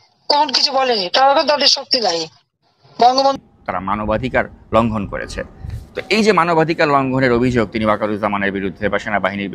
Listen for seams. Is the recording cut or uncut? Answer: cut